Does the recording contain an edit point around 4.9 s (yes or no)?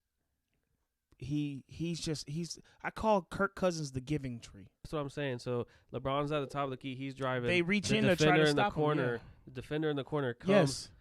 yes